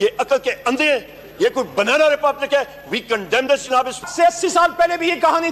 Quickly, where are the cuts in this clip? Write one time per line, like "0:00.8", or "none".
0:04.1